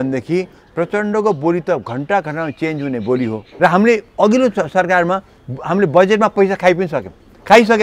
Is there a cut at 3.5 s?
yes; 1 cut; at 3.5 s

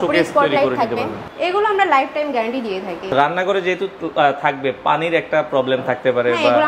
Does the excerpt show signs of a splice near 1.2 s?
yes; 2 cuts; at 1.2 s, 3.1 s

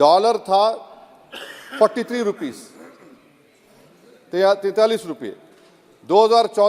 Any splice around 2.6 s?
no; 0 cuts

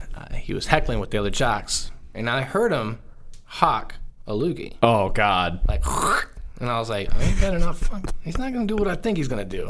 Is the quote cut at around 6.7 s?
no; 1 cut; at 2.2 s

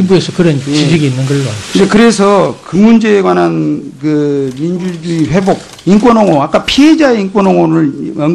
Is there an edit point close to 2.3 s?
no; 1 cut; at 6.0 s

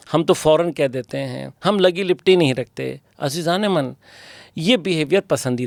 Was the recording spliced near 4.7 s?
no; 0 cuts

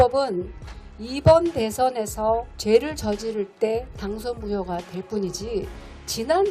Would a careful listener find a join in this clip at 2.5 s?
yes; 1 cut; at 2.5 s

